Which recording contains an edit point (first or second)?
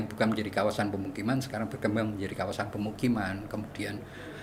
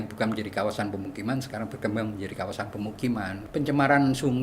second